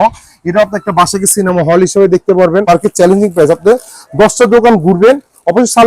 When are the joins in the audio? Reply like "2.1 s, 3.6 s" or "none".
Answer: 2.7 s